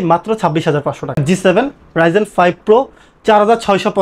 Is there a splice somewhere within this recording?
yes; 1 cut; at 1.2 s

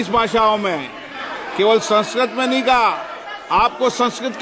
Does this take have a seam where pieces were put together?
no; 0 cuts

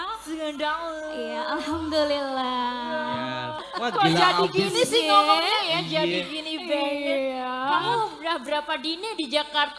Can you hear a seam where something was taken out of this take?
yes; 1 cut; at 3.6 s

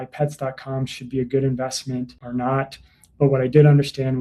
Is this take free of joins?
no; 1 cut; at 2.2 s

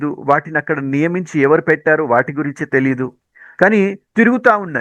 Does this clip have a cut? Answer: yes; 1 cut; at 3.2 s

